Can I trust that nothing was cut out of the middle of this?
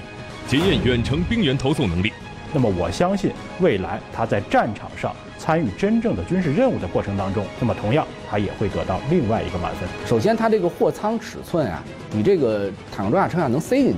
no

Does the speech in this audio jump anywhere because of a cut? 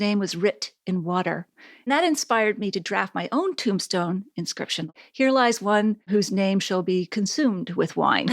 yes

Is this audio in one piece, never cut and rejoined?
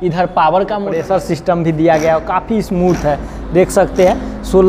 no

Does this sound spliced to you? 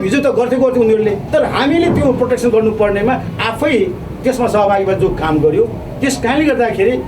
yes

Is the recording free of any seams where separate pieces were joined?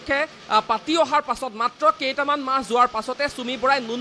yes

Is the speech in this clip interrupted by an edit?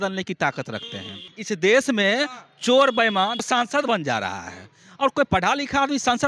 yes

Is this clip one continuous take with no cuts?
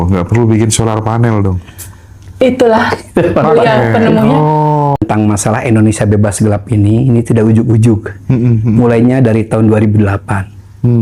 no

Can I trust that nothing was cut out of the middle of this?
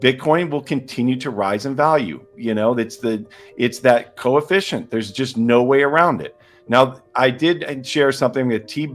no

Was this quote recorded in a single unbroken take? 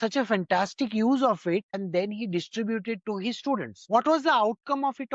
no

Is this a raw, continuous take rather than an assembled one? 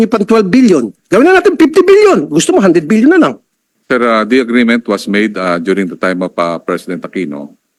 yes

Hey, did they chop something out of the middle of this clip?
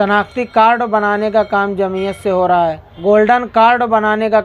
yes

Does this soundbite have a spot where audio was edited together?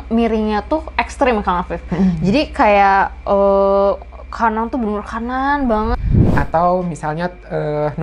yes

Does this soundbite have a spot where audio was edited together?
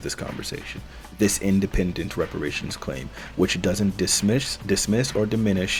no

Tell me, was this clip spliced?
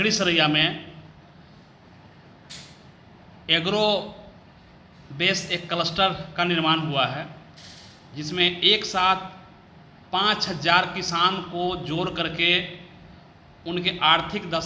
no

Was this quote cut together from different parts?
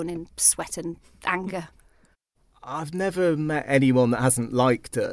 yes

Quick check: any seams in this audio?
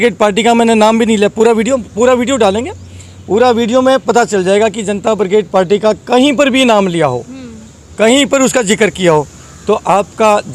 no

